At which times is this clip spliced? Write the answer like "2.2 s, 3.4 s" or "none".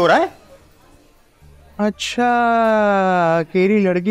none